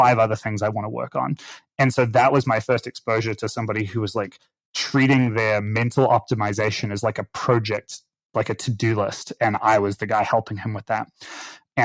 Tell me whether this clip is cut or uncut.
uncut